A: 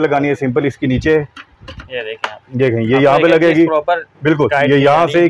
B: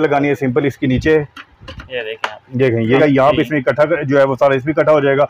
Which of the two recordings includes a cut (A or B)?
B